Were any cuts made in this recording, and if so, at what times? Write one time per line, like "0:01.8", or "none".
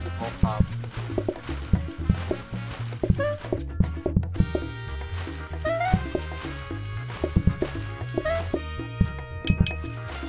none

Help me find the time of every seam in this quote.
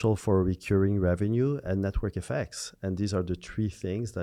none

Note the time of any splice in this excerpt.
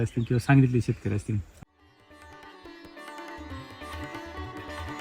0:01.5

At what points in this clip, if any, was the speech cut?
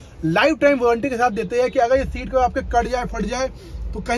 none

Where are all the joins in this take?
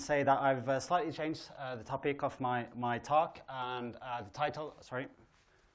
0:04.0

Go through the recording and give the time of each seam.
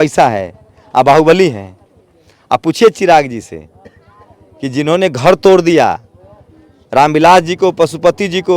none

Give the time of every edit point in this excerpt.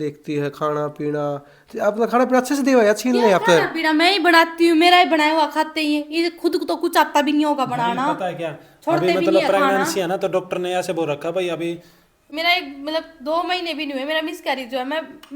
0:12.2

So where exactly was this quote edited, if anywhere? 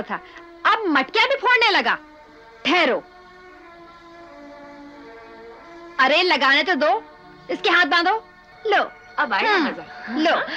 none

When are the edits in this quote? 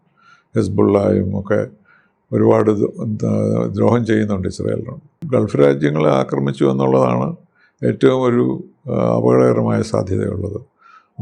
0:05.1

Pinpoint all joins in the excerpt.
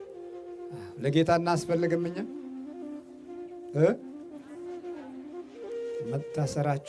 0:00.9

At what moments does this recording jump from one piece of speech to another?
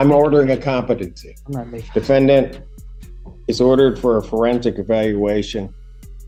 none

